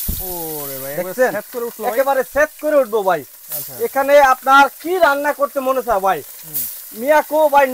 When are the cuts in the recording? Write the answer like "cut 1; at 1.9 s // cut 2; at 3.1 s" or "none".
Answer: none